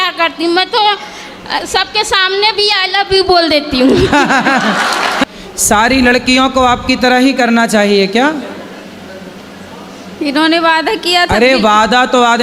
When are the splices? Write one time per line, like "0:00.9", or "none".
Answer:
0:05.2